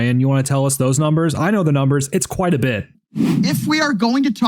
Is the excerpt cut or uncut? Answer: cut